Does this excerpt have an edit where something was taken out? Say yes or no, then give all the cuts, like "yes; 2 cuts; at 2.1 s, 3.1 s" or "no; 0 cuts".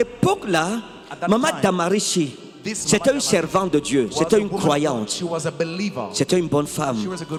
no; 0 cuts